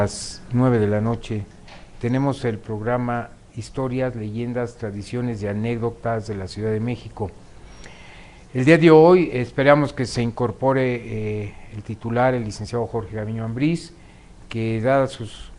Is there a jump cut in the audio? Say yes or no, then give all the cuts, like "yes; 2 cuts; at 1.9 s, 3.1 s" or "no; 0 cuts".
no; 0 cuts